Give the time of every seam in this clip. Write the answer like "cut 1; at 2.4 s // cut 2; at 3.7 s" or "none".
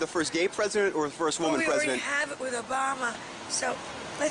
none